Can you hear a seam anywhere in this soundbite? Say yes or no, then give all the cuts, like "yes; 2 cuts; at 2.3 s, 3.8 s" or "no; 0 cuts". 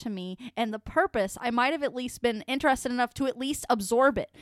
no; 0 cuts